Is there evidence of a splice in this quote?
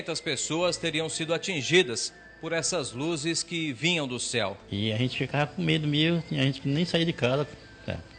yes; 1 cut; at 4.6 s

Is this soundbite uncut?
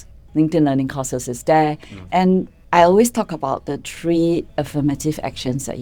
no; 1 cut; at 2.6 s

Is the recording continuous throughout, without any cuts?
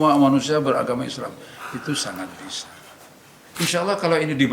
no; 1 cut; at 3.5 s

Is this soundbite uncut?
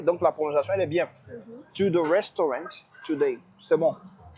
yes; 0 cuts

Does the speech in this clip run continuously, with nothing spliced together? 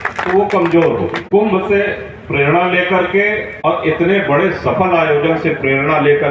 no; 2 cuts; at 1.2 s, 3.5 s

